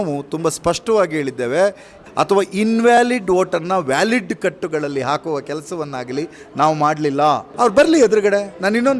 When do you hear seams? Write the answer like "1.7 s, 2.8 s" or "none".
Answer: 2.0 s, 7.5 s